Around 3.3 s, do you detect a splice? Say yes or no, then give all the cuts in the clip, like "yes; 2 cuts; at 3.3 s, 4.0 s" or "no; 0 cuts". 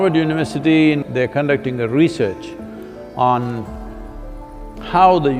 no; 1 cut; at 1.0 s